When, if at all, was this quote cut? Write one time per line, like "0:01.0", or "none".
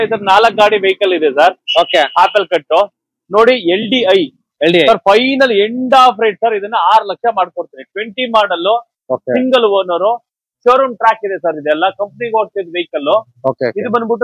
none